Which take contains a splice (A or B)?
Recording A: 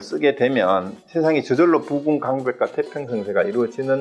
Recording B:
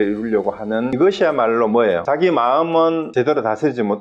B